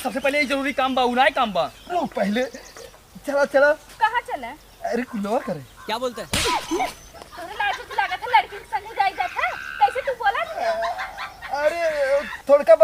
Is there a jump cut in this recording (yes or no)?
no